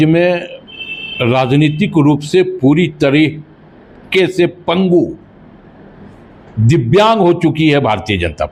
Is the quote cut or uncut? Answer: uncut